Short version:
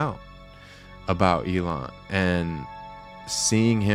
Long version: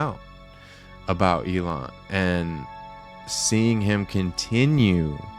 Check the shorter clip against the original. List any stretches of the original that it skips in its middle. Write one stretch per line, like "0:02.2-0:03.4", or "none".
none